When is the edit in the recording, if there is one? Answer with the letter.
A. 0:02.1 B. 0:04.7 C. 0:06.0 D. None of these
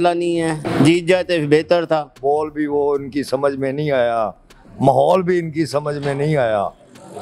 A